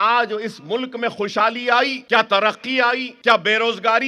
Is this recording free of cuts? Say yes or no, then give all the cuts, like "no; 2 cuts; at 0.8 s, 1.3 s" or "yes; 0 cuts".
no; 2 cuts; at 2.0 s, 3.1 s